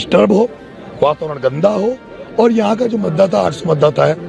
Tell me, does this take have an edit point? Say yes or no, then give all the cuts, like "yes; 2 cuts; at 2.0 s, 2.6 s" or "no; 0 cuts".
no; 0 cuts